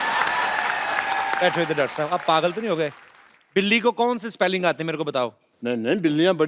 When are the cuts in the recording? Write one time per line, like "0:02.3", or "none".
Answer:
0:01.4
0:05.5